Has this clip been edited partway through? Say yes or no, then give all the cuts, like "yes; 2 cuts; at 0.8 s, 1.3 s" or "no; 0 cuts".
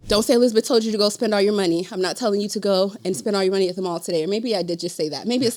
no; 0 cuts